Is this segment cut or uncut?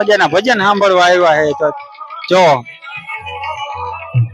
uncut